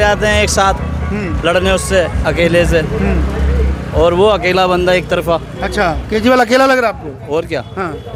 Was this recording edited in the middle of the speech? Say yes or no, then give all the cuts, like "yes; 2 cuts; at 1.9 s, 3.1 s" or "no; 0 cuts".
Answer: no; 0 cuts